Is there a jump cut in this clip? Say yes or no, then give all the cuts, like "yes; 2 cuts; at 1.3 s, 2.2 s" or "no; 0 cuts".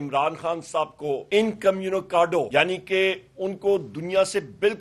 yes; 2 cuts; at 1.2 s, 2.5 s